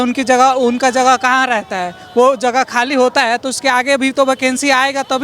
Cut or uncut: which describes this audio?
uncut